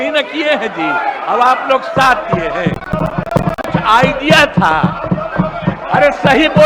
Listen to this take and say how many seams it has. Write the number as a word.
zero